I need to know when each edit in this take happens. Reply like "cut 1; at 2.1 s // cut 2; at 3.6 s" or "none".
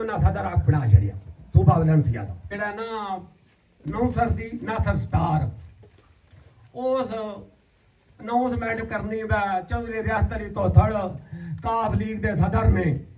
cut 1; at 2.4 s